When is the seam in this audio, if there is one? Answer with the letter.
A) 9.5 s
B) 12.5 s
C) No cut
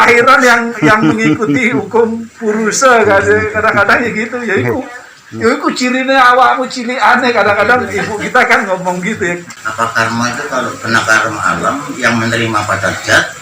A